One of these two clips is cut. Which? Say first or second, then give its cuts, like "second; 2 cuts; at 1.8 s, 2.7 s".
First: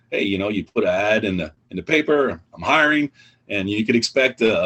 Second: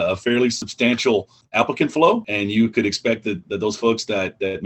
second; 2 cuts; at 1.2 s, 2.3 s